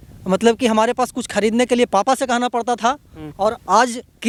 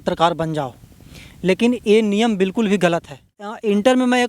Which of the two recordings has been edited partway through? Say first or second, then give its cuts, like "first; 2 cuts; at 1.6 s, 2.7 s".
second; 1 cut; at 3.3 s